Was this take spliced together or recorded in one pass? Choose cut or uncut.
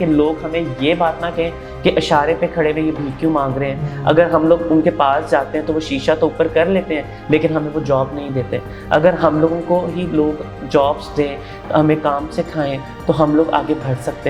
uncut